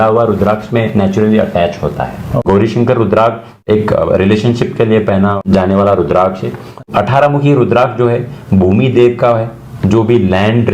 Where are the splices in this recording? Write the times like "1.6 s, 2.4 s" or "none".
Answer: 2.3 s, 3.6 s, 5.4 s, 6.8 s